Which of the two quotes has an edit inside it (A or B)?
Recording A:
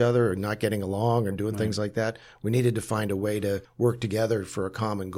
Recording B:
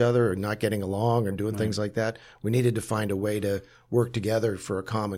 A